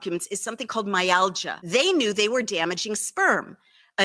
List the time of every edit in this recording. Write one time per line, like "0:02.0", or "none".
0:01.5